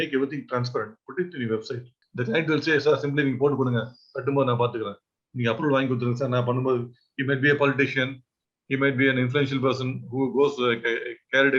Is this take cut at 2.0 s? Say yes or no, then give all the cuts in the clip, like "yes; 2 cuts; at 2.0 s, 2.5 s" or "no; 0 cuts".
yes; 1 cut; at 2.0 s